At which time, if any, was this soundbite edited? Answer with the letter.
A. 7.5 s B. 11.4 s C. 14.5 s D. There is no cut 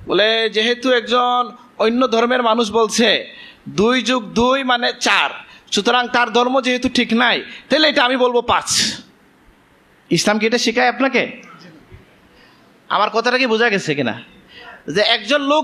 D